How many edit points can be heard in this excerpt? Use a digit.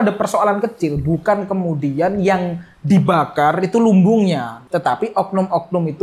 1